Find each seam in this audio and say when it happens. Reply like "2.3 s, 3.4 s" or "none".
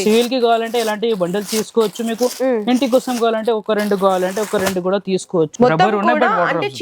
5.5 s